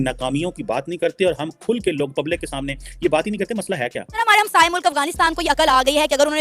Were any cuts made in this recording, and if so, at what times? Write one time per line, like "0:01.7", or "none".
0:04.2